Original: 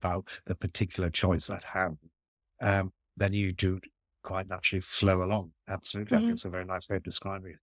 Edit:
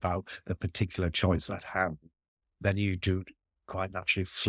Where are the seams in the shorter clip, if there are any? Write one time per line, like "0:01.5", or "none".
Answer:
0:02.5